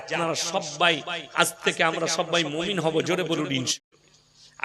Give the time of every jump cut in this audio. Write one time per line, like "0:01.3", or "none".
0:03.7